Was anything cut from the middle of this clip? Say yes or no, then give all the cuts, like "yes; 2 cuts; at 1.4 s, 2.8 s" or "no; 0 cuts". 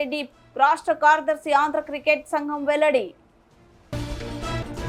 no; 0 cuts